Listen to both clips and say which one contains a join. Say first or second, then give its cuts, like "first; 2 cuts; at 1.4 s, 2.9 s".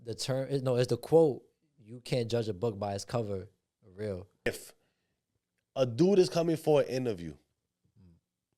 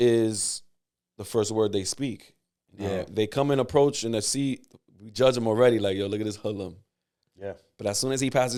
first; 1 cut; at 4.5 s